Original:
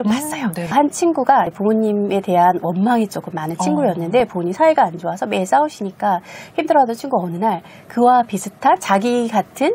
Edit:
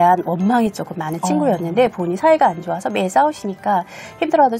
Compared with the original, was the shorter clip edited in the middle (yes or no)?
no